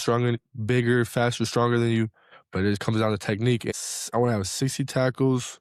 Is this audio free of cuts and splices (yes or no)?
no